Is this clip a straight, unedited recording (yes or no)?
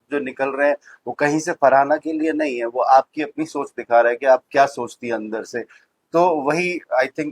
yes